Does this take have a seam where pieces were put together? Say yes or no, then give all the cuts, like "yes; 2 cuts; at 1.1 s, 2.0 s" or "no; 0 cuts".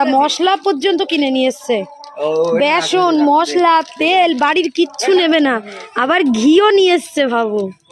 no; 0 cuts